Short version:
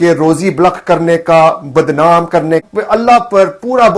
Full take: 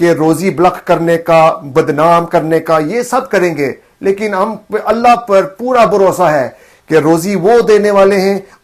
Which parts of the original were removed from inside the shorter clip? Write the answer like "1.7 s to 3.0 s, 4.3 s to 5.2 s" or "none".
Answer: 2.6 s to 4.6 s